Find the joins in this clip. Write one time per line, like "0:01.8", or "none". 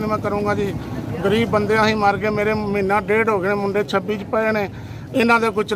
none